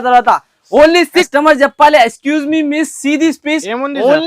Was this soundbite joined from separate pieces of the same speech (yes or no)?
yes